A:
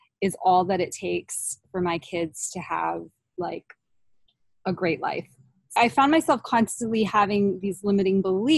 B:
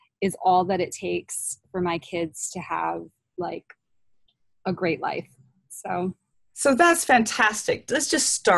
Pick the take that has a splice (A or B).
A